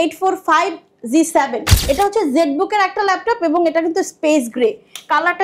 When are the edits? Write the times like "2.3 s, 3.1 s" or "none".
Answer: 1.7 s

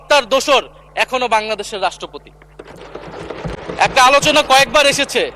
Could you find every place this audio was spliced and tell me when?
none

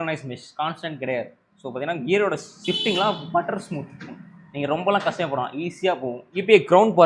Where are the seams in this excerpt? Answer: 6.1 s

